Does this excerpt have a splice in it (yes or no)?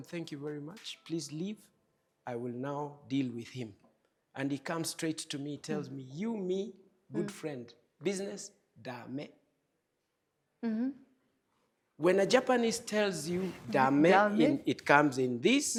no